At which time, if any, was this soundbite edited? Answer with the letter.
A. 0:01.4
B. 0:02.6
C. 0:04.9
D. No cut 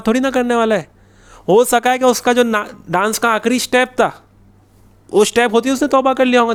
D